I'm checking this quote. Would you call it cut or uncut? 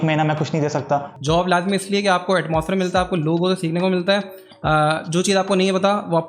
cut